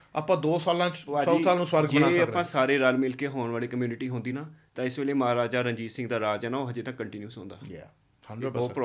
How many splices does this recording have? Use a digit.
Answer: 0